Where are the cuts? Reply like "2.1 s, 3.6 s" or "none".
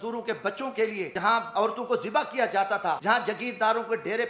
1.3 s, 3.0 s